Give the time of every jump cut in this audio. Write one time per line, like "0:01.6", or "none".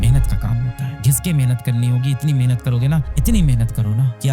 0:01.0

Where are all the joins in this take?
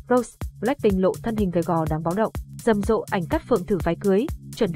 0:02.4

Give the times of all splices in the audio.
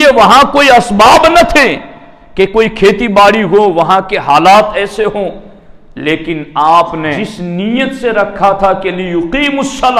0:07.3

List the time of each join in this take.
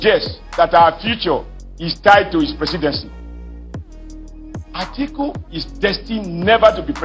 0:03.4
0:04.7

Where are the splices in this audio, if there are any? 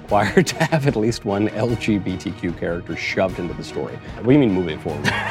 0:04.1

